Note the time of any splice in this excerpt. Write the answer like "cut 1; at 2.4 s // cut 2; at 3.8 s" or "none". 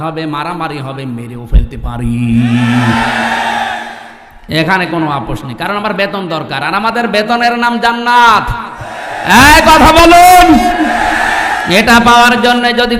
none